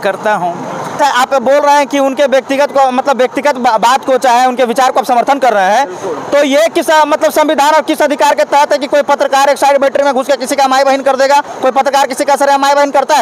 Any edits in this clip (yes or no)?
yes